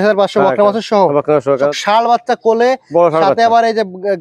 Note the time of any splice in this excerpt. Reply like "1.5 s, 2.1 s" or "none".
1.7 s